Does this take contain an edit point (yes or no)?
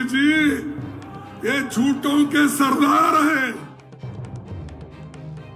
yes